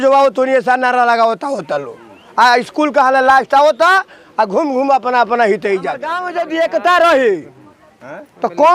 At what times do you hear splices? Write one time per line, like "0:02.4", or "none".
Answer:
0:06.3